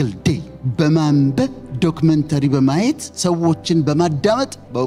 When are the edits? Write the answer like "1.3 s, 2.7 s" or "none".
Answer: none